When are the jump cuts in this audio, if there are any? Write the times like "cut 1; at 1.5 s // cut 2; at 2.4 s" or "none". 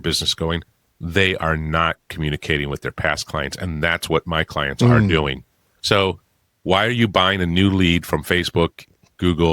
none